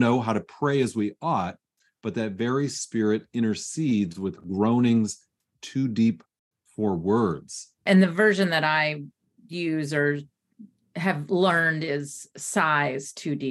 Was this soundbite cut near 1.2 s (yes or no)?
no